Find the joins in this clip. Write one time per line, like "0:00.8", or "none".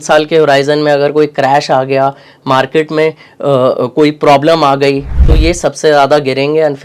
none